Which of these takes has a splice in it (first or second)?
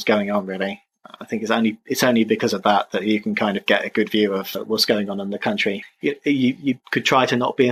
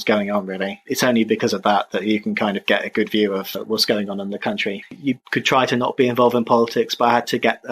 second